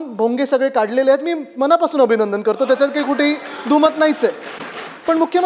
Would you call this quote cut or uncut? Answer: uncut